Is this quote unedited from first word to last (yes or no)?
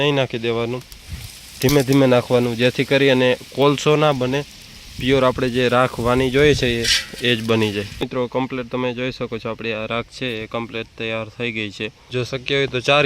no